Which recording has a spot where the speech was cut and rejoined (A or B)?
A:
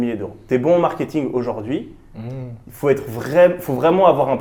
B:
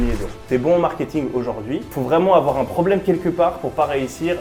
B